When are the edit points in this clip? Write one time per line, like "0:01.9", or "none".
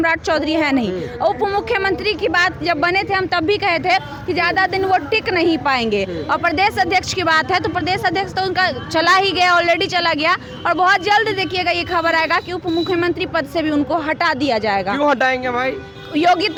none